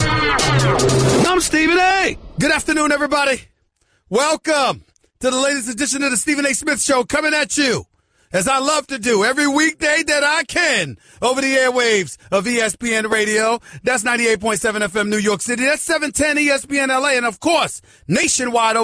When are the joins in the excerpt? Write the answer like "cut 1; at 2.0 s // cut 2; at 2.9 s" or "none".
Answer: cut 1; at 2.0 s